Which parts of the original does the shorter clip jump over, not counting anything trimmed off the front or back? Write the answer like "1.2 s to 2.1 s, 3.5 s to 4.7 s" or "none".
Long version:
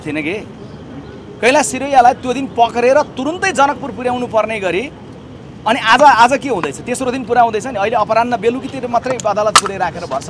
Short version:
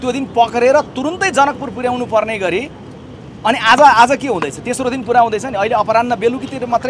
none